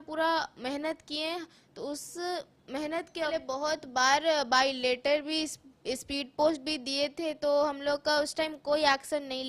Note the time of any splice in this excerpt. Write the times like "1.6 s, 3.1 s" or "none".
3.3 s